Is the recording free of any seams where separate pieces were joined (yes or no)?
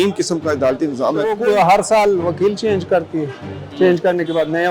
no